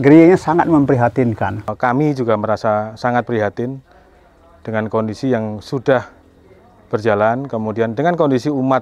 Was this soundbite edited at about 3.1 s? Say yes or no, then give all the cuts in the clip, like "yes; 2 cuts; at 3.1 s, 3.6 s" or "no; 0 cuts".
no; 1 cut; at 1.7 s